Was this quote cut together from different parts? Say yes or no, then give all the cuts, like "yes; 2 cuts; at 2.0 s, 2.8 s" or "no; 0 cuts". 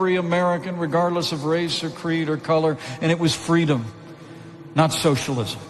yes; 1 cut; at 2.9 s